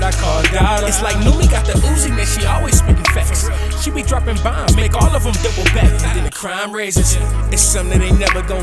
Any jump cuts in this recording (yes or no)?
no